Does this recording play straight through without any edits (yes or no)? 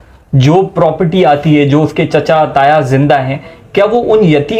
yes